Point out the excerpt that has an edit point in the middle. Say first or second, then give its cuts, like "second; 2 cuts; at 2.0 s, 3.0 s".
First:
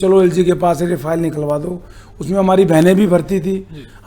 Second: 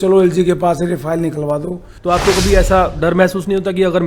second; 1 cut; at 1.9 s